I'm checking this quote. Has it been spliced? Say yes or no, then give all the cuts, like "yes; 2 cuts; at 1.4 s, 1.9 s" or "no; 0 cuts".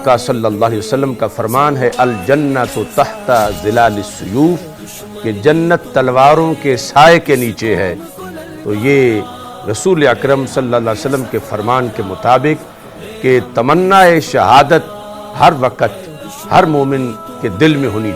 no; 0 cuts